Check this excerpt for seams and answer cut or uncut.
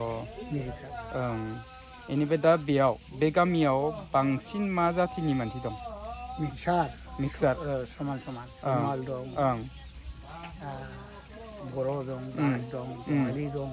uncut